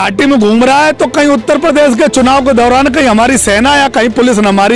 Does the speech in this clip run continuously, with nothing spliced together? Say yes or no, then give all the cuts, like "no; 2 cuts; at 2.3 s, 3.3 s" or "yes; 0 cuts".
yes; 0 cuts